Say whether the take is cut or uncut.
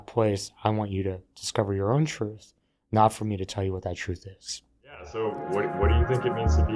cut